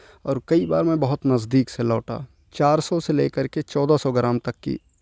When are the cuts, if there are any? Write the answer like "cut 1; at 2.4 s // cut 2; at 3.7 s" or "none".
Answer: cut 1; at 2.4 s